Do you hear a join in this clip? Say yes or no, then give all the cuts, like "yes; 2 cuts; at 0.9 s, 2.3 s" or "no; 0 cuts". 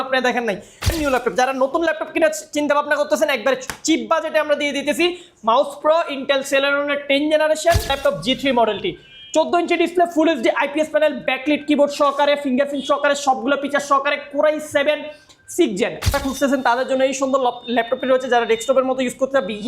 yes; 3 cuts; at 0.9 s, 8.0 s, 16.1 s